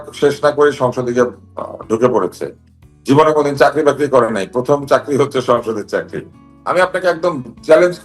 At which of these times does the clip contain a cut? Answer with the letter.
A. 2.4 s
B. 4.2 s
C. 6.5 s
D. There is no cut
C